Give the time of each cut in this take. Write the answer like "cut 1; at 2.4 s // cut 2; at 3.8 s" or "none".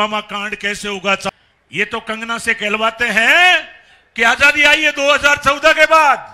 cut 1; at 1.3 s